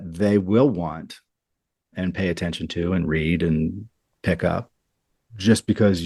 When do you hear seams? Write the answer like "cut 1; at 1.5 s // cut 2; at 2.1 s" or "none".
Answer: none